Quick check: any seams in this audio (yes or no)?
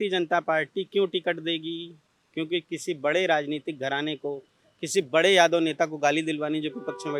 no